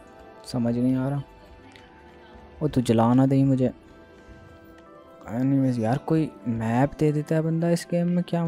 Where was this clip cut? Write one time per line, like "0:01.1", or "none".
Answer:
0:04.9